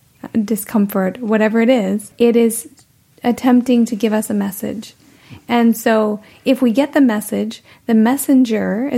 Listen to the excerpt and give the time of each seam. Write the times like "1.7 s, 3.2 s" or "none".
2.1 s